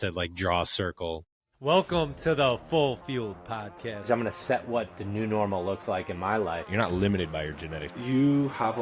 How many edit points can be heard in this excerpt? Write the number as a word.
one